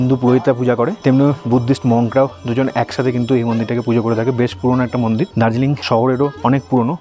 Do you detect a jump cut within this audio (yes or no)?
no